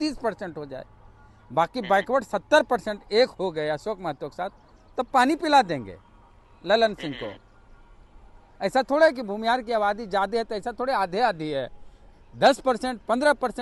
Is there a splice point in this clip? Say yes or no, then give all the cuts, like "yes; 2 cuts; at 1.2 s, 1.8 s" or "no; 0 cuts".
no; 0 cuts